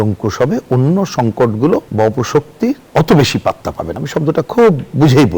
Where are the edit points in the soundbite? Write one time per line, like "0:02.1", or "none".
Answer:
none